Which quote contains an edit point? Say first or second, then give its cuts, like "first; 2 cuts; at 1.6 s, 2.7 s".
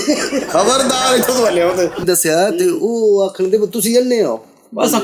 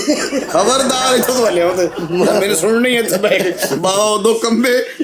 first; 1 cut; at 2.0 s